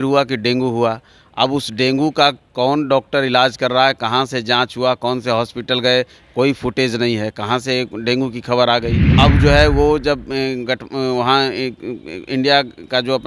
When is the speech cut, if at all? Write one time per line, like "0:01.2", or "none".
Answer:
0:09.0

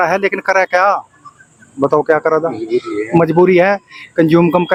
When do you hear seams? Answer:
none

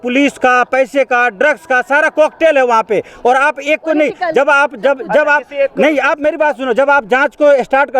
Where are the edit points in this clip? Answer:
none

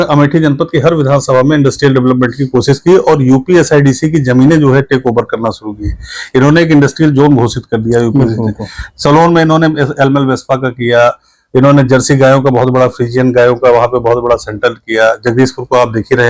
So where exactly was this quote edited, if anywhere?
none

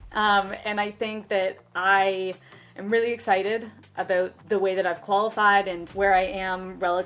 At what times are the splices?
0:04.4
0:05.8

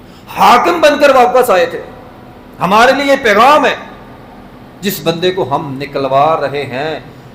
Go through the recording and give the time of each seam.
none

